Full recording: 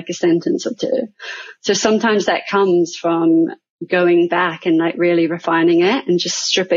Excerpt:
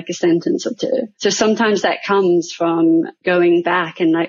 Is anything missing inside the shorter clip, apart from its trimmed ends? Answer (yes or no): yes